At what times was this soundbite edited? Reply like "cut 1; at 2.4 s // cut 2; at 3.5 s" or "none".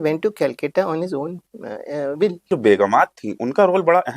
cut 1; at 2.5 s